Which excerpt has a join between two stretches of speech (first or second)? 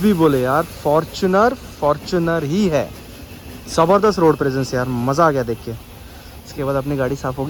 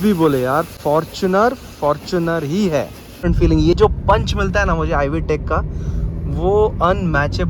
second